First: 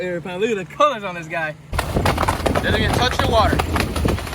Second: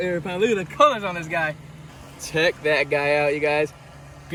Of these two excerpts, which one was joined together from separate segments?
first; 1 cut; at 1.8 s

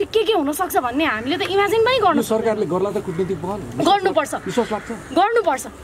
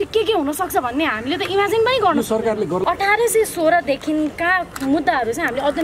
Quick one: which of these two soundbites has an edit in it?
second; 1 cut; at 2.8 s

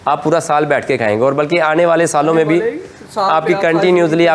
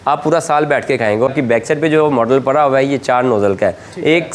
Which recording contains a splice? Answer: second; 1 cut; at 1.3 s

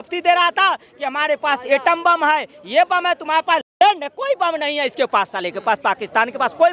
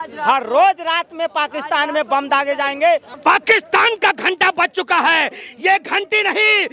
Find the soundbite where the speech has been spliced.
second; 1 cut; at 3.1 s

